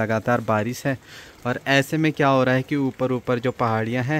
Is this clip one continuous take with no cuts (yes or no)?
yes